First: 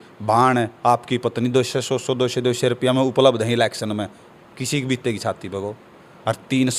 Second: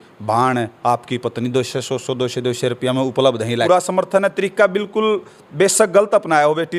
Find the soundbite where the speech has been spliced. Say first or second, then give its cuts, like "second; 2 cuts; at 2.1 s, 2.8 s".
second; 1 cut; at 3.6 s